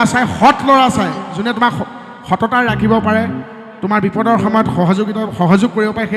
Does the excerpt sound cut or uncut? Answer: uncut